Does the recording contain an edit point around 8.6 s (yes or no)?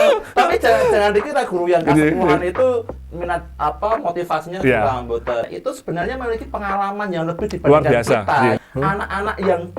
yes